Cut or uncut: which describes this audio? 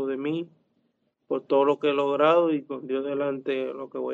uncut